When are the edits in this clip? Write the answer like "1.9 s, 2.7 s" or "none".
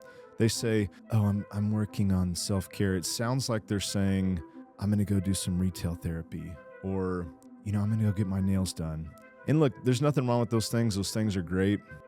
1.0 s

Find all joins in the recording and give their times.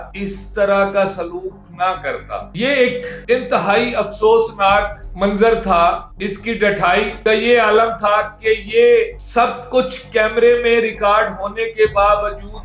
6.1 s

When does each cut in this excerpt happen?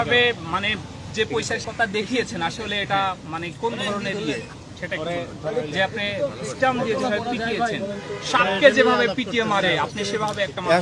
1.7 s

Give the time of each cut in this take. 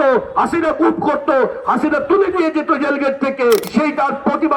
3.7 s

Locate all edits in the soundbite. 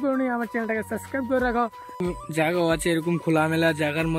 2.0 s

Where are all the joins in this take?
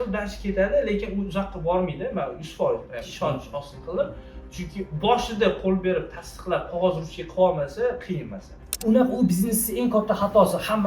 8.8 s

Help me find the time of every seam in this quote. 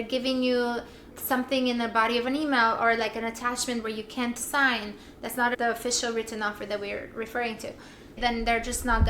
8.1 s

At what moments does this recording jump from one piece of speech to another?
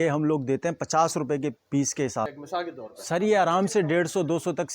2.4 s

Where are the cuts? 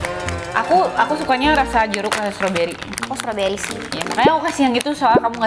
none

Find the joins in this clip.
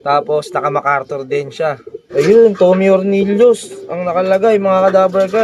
2.0 s

